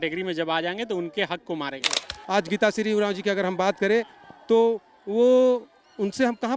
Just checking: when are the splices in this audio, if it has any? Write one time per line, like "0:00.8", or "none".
0:02.1

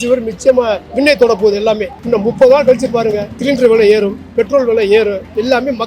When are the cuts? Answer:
0:00.8
0:01.9

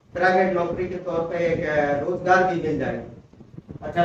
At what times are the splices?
none

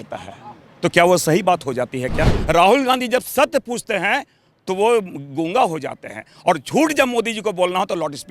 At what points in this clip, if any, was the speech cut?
0:02.4

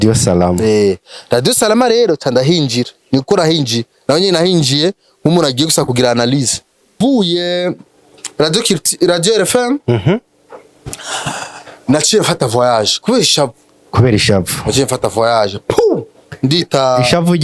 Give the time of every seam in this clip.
0:06.9

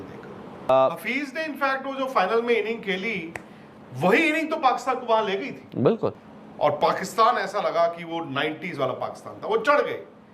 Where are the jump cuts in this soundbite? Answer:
0:00.7
0:06.3

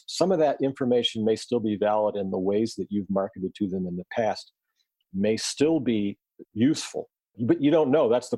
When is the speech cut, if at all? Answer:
0:07.2

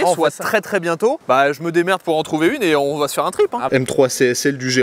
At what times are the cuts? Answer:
0:01.2
0:03.7

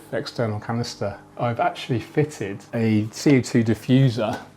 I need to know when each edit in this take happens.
0:01.2

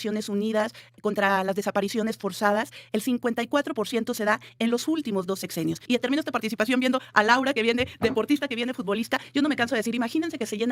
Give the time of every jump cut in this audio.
0:05.8

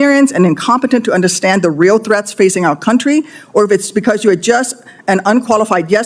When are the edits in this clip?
none

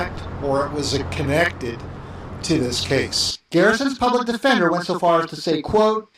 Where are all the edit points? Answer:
none

